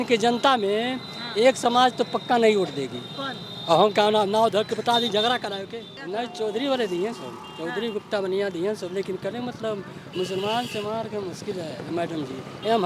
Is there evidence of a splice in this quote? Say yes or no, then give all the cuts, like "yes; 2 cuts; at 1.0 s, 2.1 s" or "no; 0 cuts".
yes; 1 cut; at 5.9 s